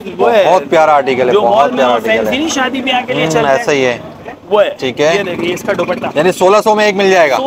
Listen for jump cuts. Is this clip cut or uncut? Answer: uncut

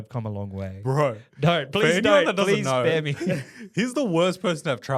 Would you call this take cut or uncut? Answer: uncut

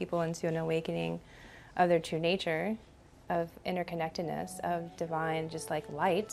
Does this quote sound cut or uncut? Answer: uncut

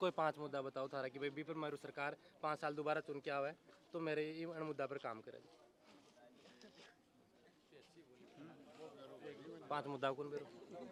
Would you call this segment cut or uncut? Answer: uncut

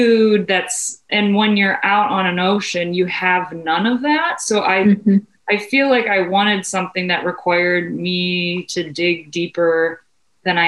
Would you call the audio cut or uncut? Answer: cut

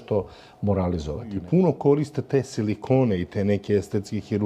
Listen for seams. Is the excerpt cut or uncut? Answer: cut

